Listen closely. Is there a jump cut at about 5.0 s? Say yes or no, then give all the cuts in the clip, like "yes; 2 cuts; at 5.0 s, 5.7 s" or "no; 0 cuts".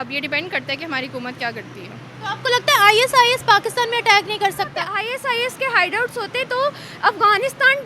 yes; 1 cut; at 5.0 s